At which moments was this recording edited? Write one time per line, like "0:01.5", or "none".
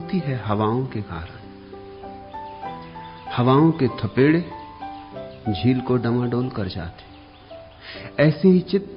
0:01.6
0:03.1